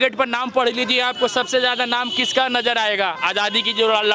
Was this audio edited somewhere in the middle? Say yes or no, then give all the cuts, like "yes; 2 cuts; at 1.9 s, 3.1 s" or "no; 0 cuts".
no; 0 cuts